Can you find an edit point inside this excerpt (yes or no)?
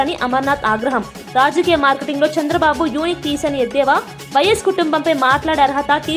no